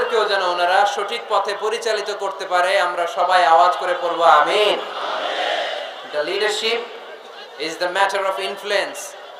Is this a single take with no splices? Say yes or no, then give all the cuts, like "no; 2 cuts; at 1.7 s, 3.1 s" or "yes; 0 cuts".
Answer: yes; 0 cuts